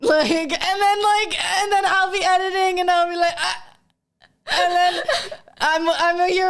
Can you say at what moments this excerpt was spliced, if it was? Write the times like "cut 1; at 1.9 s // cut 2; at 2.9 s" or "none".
none